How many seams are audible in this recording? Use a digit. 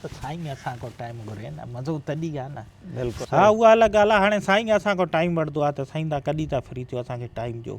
1